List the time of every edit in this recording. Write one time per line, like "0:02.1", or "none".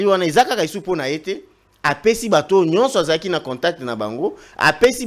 none